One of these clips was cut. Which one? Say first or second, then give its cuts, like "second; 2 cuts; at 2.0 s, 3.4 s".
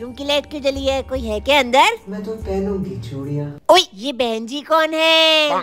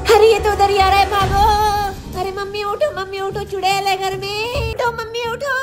second; 1 cut; at 4.7 s